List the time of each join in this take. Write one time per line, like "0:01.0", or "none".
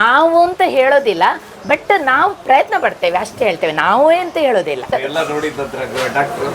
0:04.9